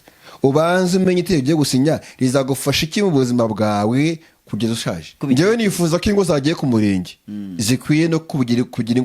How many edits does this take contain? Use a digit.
1